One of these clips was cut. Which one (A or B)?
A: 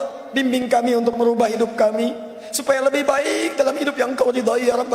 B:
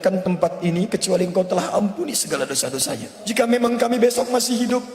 B